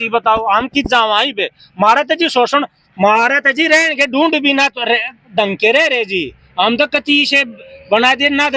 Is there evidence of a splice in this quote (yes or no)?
no